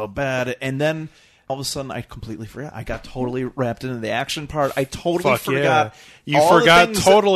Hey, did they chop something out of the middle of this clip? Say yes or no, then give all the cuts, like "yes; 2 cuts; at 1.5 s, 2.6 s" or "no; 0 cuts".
yes; 1 cut; at 1.5 s